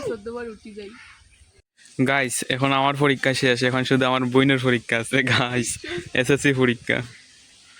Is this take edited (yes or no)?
yes